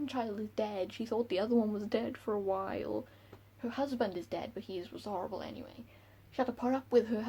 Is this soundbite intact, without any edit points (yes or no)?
yes